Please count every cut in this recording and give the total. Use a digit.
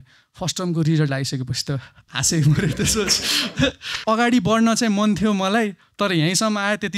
1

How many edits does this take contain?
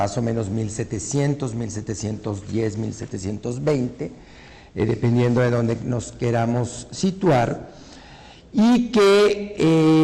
1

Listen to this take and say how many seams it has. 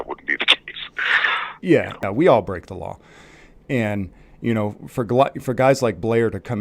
1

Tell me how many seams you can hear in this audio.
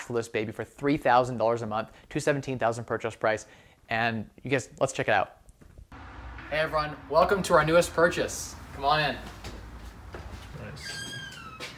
1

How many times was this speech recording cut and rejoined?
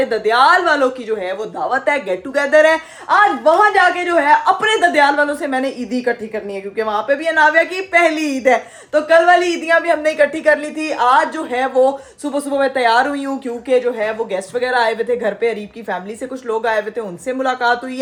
0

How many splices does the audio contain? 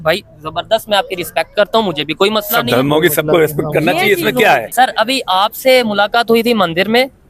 1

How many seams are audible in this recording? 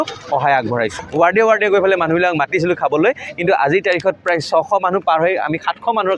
1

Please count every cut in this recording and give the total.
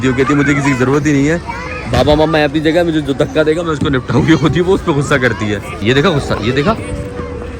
1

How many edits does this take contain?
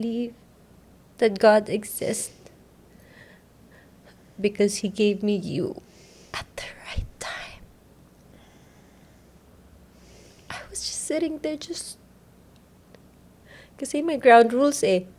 0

